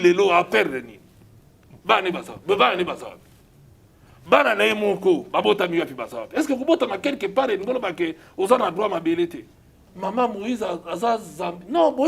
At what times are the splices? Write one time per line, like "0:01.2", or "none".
0:09.8